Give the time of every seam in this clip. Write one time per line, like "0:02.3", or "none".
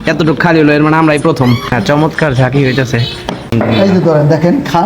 0:01.7
0:03.5